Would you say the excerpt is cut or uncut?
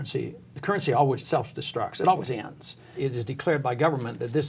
cut